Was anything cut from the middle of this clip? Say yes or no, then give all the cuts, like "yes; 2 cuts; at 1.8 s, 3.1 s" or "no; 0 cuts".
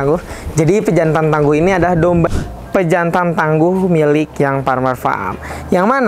yes; 1 cut; at 2.3 s